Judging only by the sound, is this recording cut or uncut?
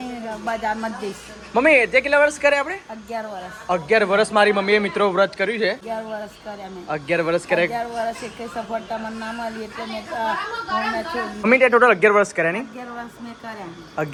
uncut